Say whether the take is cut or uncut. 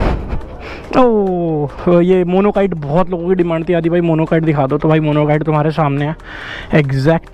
cut